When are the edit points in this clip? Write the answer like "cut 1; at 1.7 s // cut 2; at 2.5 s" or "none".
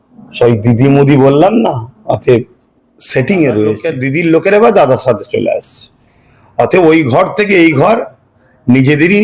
cut 1; at 3.9 s